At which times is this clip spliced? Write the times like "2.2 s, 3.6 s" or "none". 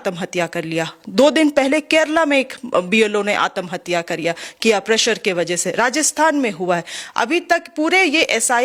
none

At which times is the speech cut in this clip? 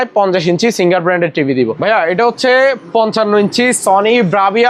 1.8 s

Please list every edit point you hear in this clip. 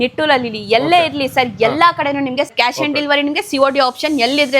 2.5 s

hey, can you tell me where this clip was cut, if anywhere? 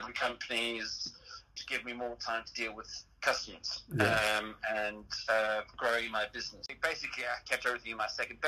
1.4 s, 6.7 s

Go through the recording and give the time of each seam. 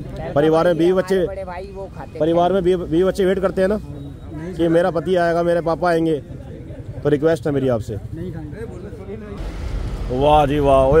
9.4 s

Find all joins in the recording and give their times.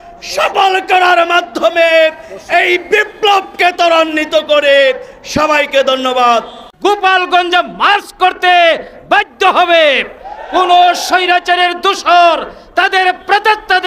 6.6 s

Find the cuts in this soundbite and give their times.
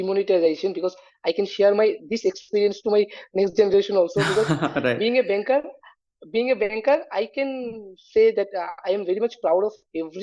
none

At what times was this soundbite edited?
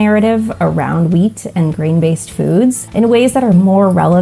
2.8 s

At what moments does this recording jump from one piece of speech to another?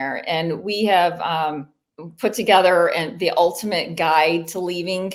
none

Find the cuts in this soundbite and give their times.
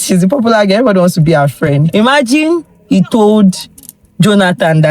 1.9 s

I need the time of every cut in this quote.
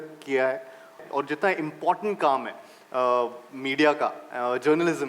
1.0 s

